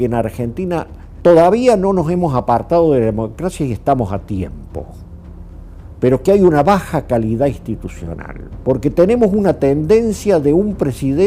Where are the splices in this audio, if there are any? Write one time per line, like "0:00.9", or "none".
none